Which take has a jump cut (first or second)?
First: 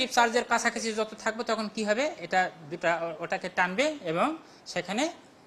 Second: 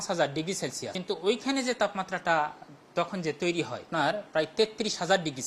second